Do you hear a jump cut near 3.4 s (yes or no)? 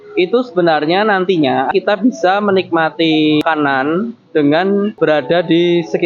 yes